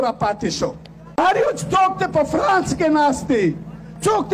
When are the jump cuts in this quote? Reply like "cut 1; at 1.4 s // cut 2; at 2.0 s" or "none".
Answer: cut 1; at 1.0 s